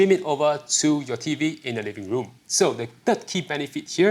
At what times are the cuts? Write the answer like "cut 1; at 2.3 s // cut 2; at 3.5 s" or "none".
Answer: cut 1; at 2.3 s